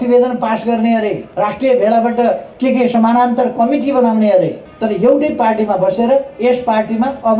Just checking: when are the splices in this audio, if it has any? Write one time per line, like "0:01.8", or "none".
0:01.2
0:02.5
0:04.6